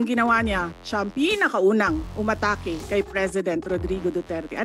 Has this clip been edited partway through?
yes; 1 cut; at 2.8 s

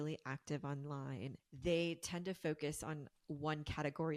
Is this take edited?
yes; 1 cut; at 1.4 s

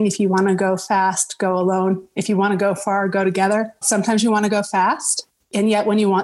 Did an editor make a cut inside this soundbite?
yes; 1 cut; at 3.8 s

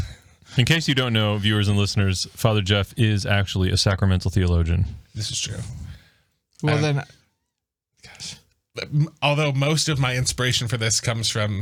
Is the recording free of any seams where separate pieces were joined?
yes; 0 cuts

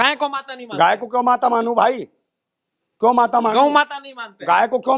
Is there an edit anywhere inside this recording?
no; 0 cuts

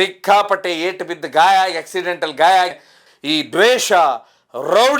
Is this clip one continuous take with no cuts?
no; 1 cut; at 2.9 s

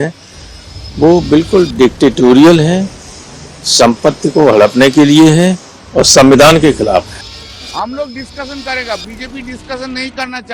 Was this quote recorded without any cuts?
no; 1 cut; at 7.2 s

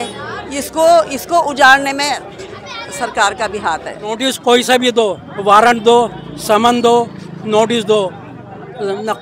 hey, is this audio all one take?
no; 1 cut; at 4.2 s

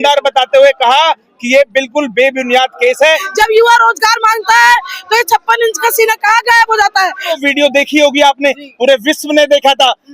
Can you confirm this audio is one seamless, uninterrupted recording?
no; 2 cuts; at 3.3 s, 7.4 s

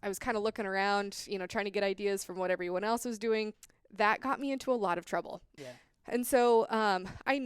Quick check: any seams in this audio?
yes; 2 cuts; at 3.5 s, 5.5 s

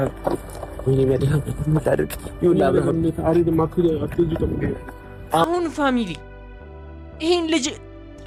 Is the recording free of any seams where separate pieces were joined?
yes; 0 cuts

